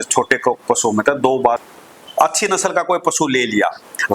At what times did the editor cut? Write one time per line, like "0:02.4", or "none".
0:01.6